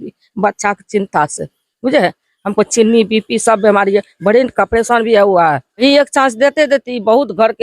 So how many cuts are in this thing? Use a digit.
1